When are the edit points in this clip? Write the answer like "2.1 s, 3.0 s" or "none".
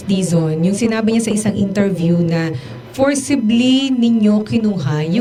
none